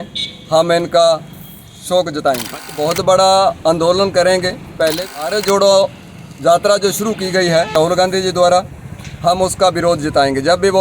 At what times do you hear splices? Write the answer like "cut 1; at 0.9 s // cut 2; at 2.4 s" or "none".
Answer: cut 1; at 2.7 s // cut 2; at 5.1 s // cut 3; at 7.7 s